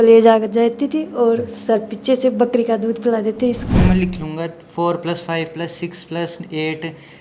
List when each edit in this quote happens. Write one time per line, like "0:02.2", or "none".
0:03.7